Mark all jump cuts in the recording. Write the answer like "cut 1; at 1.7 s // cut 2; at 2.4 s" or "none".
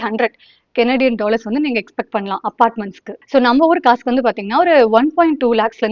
none